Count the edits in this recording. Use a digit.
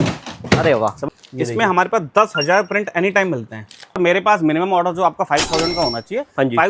2